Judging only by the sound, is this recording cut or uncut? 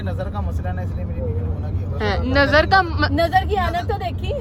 uncut